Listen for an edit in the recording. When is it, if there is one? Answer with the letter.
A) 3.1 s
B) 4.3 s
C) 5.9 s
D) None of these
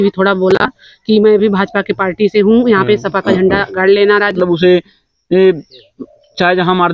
B